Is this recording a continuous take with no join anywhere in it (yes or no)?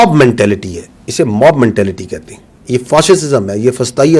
yes